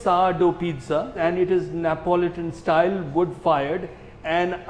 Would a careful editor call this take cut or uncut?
uncut